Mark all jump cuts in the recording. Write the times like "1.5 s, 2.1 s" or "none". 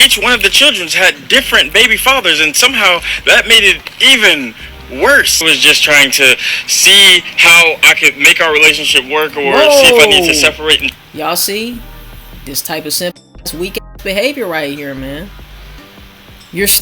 5.3 s